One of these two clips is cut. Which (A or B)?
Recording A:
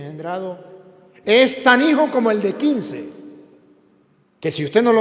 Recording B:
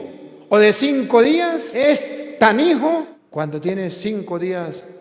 B